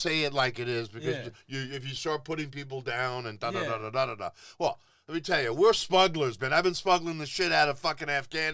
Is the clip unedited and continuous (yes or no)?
yes